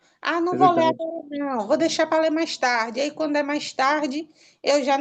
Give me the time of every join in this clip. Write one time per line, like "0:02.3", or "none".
none